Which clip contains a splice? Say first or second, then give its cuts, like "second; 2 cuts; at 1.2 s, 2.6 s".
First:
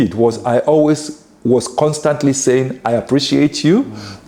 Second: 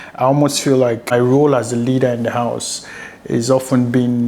second; 1 cut; at 1.1 s